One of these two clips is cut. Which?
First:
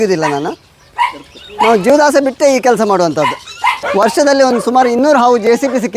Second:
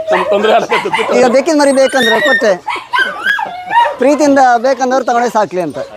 first; 1 cut; at 3.8 s

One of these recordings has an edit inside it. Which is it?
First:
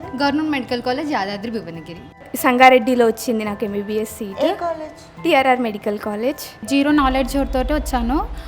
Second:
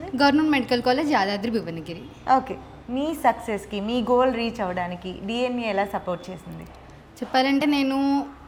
first; 2 cuts; at 2.2 s, 6.6 s

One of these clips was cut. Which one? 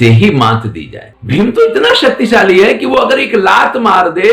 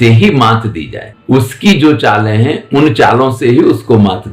first; 1 cut; at 1.1 s

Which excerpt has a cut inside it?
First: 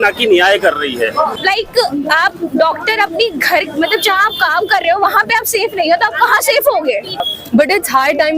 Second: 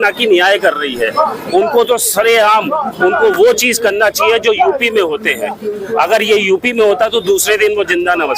first; 2 cuts; at 1.4 s, 7.3 s

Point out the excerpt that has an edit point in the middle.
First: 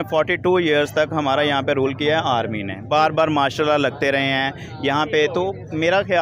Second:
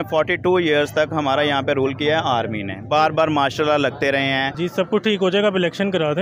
second; 1 cut; at 4.5 s

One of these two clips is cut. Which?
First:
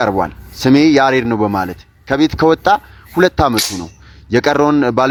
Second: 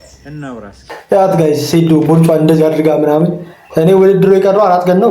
second; 1 cut; at 1.0 s

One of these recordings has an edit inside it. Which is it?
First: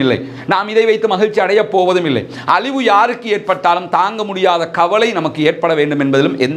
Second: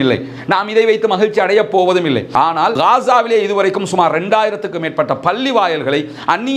second; 1 cut; at 2.4 s

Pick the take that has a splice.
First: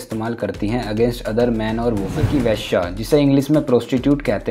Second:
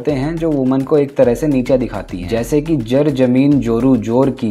first; 1 cut; at 2.2 s

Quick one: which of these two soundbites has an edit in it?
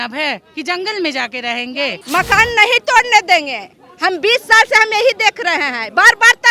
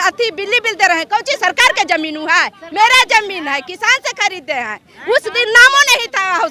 first; 1 cut; at 2.0 s

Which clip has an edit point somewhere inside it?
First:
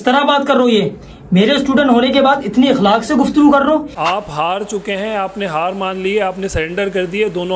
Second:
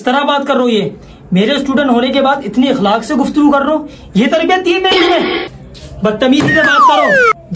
first; 1 cut; at 3.9 s

